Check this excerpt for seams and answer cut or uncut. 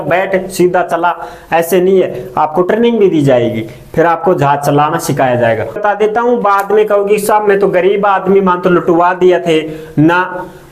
cut